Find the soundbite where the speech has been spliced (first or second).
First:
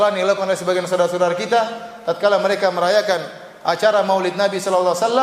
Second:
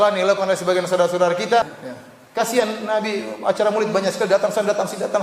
second